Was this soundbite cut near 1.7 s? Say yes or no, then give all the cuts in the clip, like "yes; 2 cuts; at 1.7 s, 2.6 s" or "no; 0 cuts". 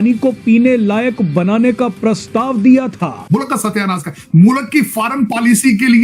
no; 1 cut; at 3.1 s